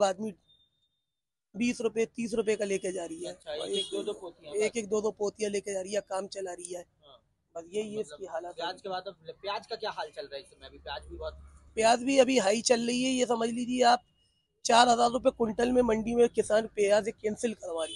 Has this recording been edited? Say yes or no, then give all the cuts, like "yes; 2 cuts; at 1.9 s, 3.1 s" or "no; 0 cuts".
no; 0 cuts